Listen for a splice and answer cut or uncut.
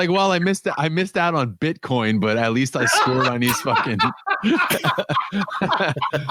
uncut